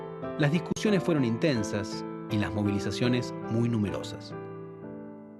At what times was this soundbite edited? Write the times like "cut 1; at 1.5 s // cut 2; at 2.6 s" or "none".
cut 1; at 4.0 s